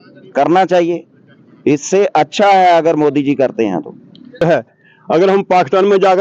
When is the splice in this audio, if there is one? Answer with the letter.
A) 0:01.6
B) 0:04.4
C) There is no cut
B